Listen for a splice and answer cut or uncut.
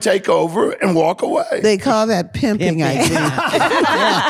uncut